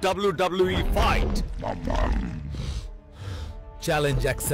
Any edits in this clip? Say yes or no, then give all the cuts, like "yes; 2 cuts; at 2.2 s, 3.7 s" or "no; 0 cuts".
no; 0 cuts